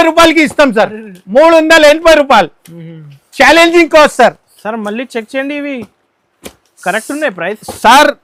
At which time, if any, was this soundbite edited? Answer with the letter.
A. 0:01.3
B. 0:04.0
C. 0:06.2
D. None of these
D